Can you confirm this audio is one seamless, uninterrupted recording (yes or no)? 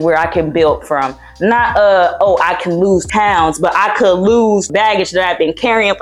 yes